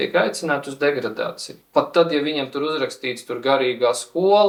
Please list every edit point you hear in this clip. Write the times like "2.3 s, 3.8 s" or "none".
none